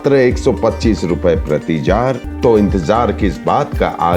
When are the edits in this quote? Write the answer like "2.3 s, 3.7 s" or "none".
2.3 s